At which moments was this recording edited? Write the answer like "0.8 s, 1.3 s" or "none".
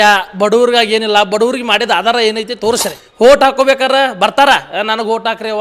3.0 s